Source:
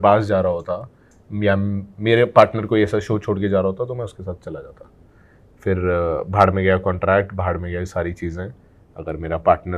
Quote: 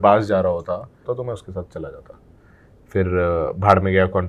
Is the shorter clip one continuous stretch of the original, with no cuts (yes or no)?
no